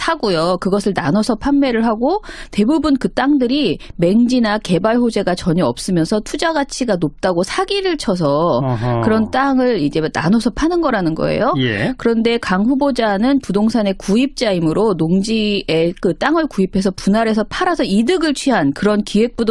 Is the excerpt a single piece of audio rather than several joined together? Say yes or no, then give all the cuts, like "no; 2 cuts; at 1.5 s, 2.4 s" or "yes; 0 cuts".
no; 1 cut; at 5.8 s